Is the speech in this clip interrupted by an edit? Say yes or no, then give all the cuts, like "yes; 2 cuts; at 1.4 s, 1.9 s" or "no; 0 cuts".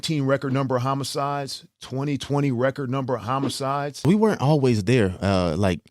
yes; 1 cut; at 4.0 s